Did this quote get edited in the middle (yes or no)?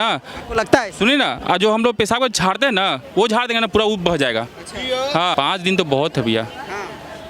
yes